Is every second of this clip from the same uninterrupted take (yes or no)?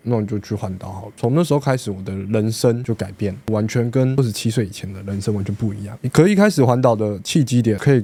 yes